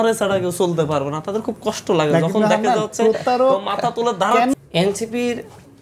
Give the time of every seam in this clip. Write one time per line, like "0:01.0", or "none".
0:04.5

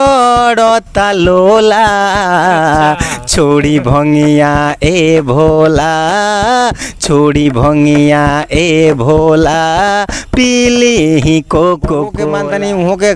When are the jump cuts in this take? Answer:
0:12.2

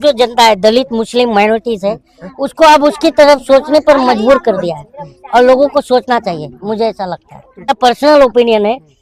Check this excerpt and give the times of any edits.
0:07.7

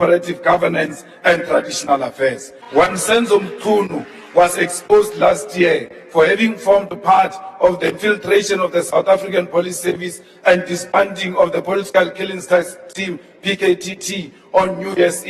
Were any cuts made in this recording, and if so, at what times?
0:02.5

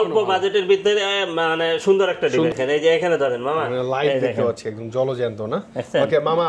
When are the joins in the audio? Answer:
0:02.5

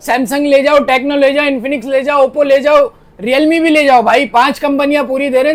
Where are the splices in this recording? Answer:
none

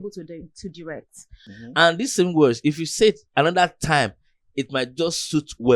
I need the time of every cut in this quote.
0:01.4

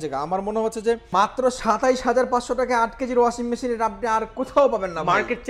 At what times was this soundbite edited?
0:01.0

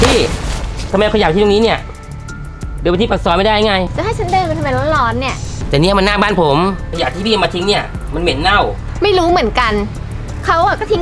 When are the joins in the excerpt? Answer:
0:03.9
0:05.4
0:06.9
0:08.8

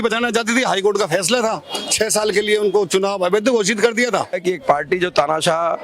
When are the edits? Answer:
0:04.4

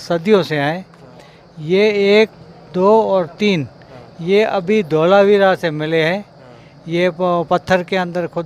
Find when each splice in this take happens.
none

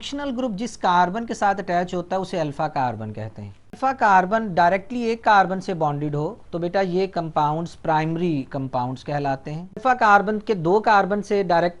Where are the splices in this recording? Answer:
0:03.8
0:09.8

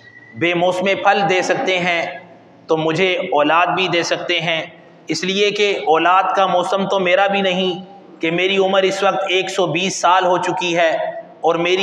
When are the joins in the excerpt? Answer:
none

